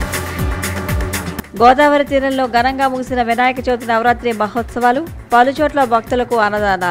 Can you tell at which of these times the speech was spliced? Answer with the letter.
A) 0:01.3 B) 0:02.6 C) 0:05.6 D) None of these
A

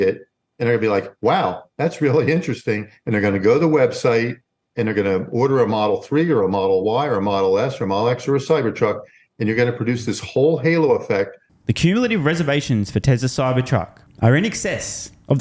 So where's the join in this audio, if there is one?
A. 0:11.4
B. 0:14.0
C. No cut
A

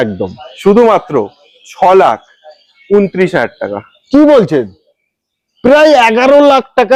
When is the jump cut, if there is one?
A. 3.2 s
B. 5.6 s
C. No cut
C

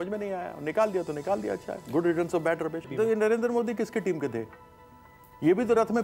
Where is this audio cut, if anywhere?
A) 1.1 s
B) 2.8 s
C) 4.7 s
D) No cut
B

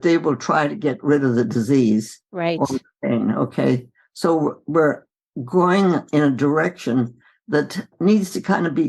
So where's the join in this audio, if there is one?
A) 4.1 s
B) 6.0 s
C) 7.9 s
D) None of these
C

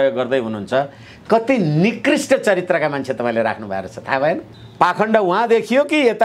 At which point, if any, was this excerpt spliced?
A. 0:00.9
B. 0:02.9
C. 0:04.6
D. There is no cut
C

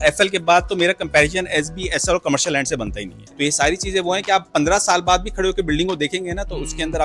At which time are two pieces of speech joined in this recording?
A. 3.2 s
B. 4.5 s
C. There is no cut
A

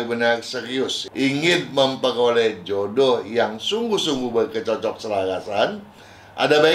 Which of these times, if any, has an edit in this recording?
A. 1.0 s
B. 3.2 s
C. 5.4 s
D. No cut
A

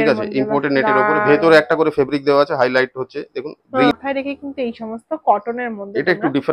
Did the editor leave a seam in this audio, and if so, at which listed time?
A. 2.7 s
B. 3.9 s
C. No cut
B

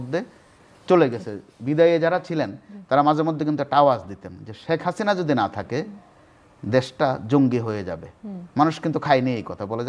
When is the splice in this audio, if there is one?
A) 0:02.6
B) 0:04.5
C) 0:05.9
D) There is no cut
A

